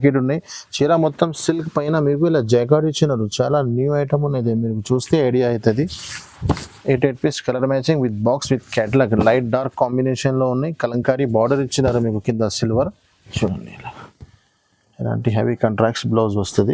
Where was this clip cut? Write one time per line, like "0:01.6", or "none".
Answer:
0:13.3